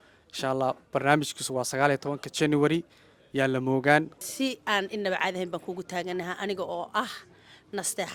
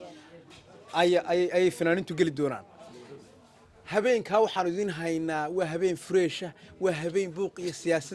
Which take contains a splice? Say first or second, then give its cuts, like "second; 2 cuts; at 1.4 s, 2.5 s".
first; 1 cut; at 4.1 s